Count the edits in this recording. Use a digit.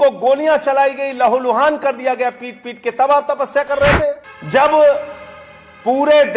1